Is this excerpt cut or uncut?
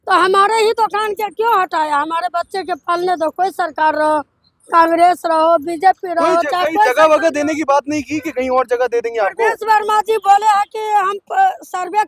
uncut